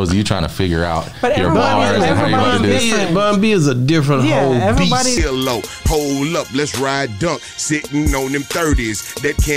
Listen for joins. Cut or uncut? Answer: uncut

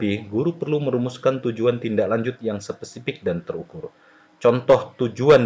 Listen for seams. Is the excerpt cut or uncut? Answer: uncut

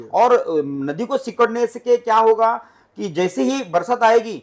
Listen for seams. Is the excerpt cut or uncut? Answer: uncut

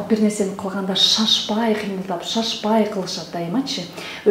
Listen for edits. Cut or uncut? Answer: uncut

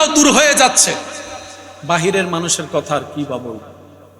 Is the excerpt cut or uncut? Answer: uncut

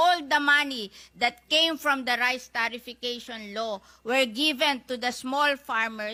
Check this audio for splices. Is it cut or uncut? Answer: uncut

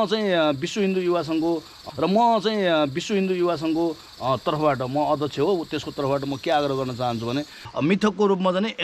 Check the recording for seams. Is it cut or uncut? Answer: cut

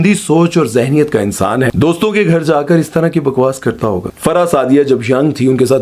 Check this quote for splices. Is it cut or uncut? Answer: cut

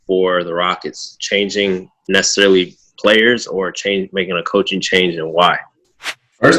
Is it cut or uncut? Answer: uncut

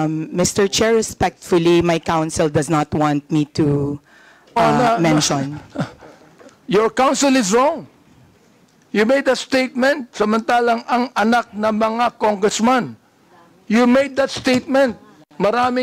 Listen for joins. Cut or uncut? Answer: uncut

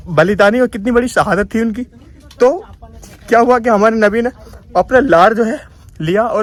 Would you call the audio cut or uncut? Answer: uncut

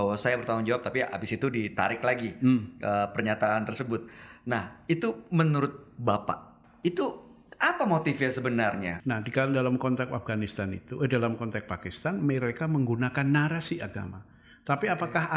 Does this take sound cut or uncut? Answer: cut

